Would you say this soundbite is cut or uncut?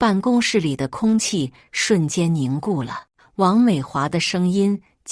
uncut